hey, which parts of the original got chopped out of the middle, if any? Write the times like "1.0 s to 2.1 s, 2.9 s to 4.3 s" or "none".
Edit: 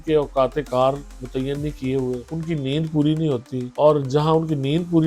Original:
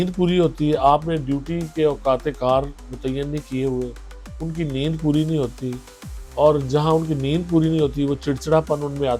4.0 s to 4.4 s, 5.7 s to 6.2 s